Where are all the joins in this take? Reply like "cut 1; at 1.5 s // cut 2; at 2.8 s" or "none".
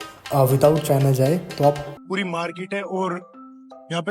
cut 1; at 2.0 s